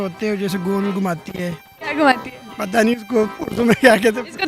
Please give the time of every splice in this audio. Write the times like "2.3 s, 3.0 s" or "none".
none